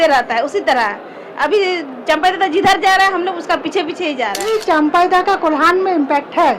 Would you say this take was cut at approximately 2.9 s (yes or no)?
no